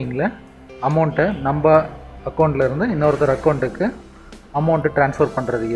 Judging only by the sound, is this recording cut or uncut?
cut